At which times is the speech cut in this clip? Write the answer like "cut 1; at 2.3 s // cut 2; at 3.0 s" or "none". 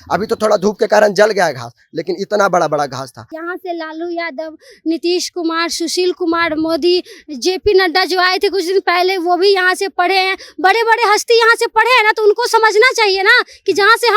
cut 1; at 3.3 s